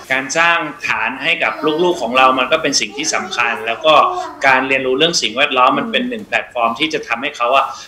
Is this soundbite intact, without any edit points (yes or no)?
yes